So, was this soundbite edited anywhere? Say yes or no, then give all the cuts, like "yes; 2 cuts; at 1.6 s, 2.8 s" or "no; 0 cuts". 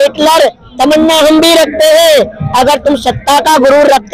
no; 0 cuts